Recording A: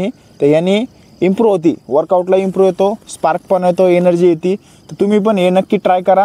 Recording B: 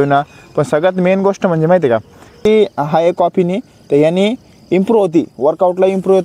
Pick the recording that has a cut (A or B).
B